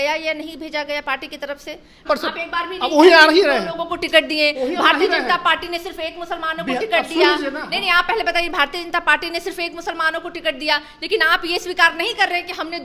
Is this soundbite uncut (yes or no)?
no